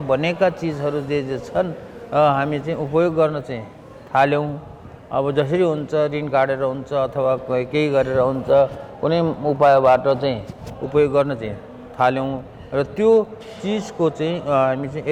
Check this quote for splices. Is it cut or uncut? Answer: uncut